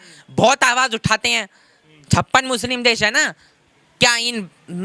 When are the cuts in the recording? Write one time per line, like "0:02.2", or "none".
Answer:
none